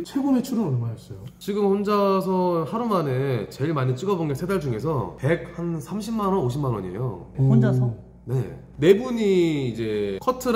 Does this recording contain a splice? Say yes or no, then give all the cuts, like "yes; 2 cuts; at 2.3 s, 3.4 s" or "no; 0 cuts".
no; 0 cuts